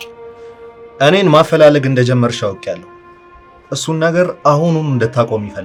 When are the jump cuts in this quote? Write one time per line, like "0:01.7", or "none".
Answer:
none